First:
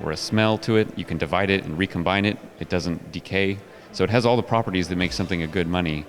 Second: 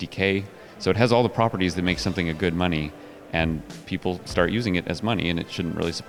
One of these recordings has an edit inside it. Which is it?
first; 1 cut; at 1.0 s

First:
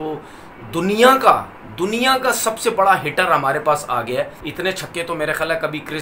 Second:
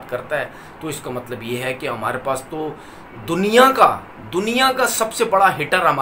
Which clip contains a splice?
first; 1 cut; at 4.4 s

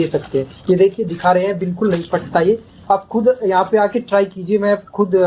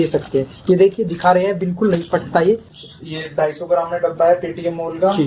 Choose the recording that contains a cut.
second; 1 cut; at 2.7 s

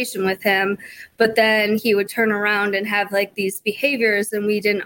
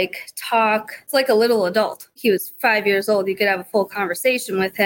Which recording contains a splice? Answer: second; 2 cuts; at 1.1 s, 2.1 s

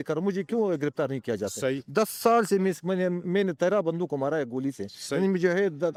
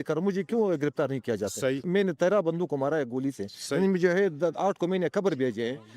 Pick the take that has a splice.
second; 1 cut; at 1.8 s

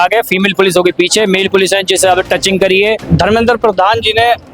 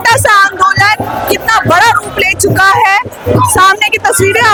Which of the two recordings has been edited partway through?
first; 1 cut; at 3.1 s

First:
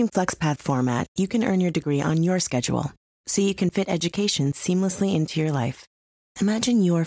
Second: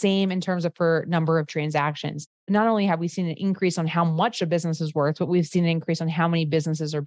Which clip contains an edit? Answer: second; 1 cut; at 2.4 s

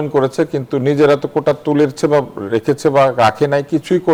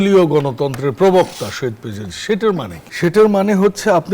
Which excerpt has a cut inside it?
second; 1 cut; at 2.8 s

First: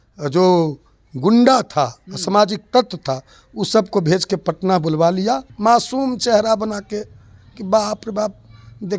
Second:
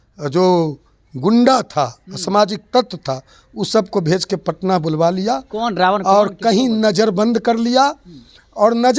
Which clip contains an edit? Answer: first; 1 cut; at 5.5 s

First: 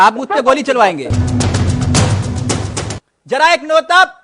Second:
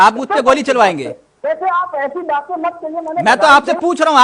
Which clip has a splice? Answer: first; 2 cuts; at 1.1 s, 2.9 s

